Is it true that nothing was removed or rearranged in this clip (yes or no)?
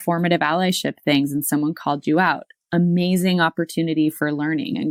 yes